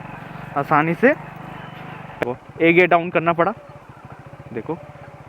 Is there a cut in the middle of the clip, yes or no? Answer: yes